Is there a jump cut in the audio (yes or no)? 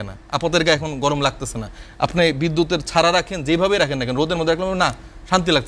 no